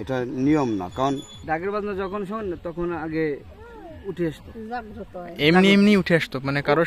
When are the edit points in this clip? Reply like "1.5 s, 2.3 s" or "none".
1.3 s